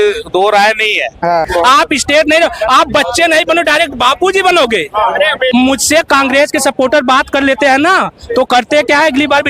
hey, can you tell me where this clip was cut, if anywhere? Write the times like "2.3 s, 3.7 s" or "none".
1.5 s